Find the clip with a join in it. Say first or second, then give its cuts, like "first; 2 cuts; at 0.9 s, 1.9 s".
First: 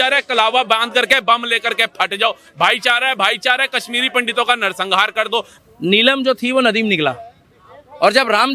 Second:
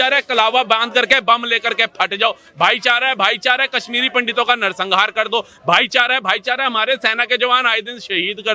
first; 1 cut; at 5.5 s